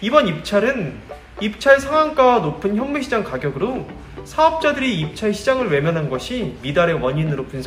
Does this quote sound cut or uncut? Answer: uncut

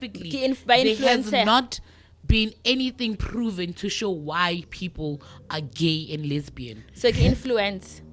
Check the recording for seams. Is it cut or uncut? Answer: uncut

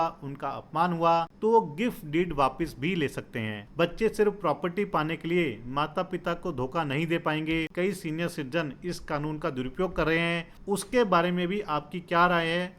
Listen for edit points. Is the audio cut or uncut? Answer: cut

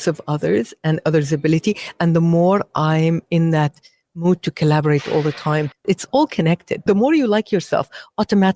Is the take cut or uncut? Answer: cut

